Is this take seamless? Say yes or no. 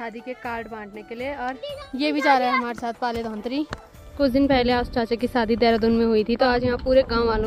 yes